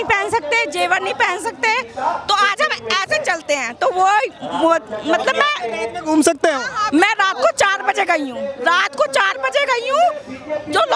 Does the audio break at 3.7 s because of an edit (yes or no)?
no